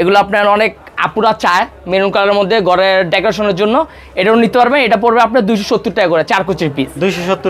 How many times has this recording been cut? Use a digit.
0